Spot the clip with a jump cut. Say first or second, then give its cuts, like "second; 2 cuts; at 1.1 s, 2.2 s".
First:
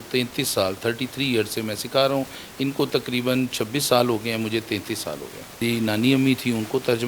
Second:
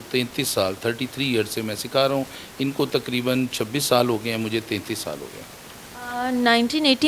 first; 1 cut; at 5.6 s